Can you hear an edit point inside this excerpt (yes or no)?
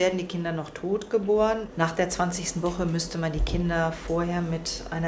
yes